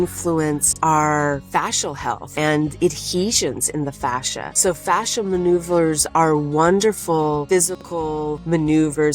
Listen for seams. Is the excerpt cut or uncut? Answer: uncut